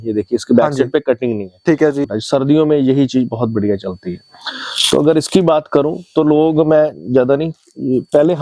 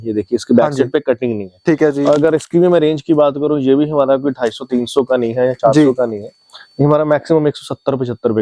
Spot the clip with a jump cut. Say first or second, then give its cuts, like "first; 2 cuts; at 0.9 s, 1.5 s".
first; 1 cut; at 2.0 s